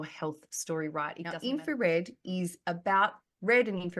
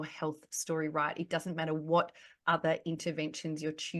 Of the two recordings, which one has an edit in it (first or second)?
first